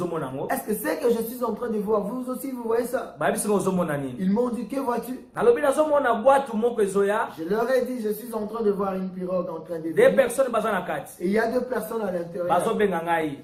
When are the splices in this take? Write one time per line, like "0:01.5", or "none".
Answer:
none